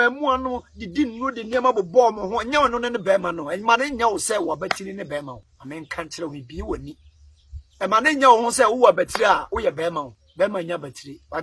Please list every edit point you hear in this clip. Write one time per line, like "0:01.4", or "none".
0:05.5
0:10.2